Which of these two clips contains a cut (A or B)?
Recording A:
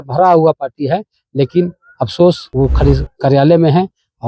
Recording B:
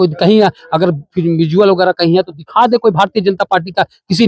A